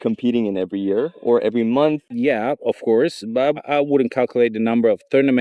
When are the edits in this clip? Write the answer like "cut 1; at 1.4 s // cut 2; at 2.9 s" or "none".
cut 1; at 2.1 s